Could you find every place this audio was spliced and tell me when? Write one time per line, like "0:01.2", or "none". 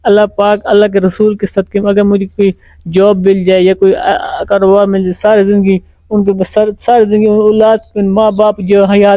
none